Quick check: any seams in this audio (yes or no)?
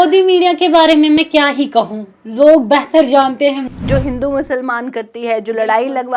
yes